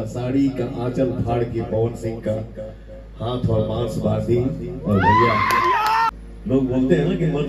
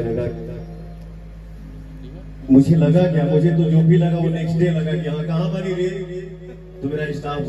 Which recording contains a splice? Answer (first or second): first